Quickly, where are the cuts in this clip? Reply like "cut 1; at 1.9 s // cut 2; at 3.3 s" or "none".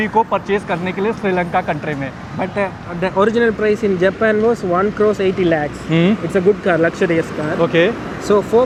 none